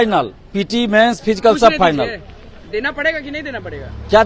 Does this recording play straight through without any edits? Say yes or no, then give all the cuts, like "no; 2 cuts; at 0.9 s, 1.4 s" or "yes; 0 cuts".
yes; 0 cuts